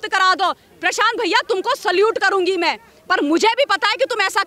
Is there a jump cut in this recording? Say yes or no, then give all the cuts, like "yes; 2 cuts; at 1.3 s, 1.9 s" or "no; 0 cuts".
no; 0 cuts